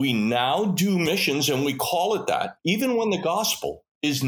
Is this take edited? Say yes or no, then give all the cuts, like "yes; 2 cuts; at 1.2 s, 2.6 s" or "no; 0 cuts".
yes; 2 cuts; at 1.1 s, 2.5 s